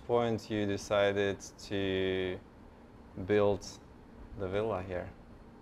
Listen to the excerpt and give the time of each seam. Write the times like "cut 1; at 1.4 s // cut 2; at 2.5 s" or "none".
none